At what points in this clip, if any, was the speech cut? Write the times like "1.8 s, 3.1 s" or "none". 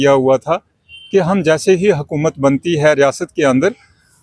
none